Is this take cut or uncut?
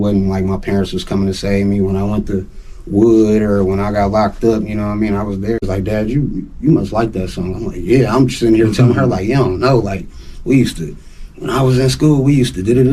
cut